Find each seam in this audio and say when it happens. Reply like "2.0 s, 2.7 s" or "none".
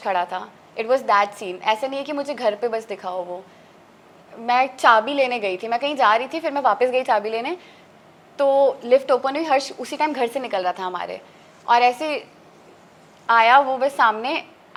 none